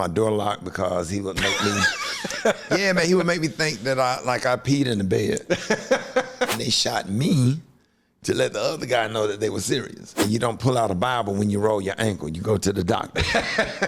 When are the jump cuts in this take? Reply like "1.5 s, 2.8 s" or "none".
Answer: 6.6 s, 10.2 s